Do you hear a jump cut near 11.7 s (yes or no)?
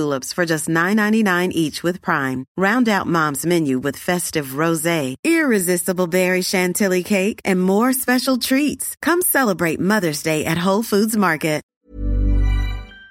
yes